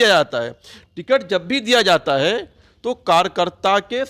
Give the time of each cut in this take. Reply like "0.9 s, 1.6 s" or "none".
none